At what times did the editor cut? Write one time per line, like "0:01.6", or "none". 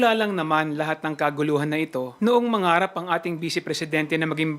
0:02.1